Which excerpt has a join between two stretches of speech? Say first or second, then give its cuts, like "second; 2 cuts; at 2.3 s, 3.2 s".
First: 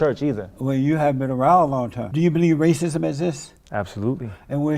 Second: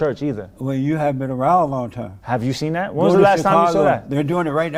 first; 1 cut; at 2.0 s